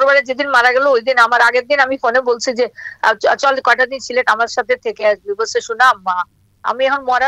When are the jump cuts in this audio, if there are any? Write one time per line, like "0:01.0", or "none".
none